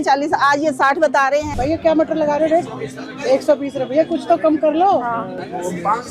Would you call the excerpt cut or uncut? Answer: cut